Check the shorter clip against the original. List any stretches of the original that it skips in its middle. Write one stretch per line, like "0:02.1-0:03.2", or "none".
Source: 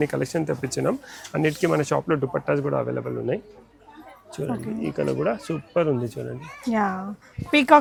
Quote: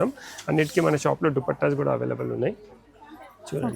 none